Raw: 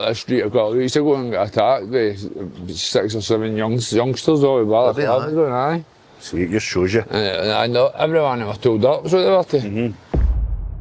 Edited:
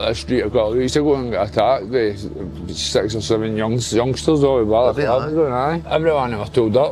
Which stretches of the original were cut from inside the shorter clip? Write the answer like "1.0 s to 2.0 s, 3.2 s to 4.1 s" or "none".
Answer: 5.9 s to 7.9 s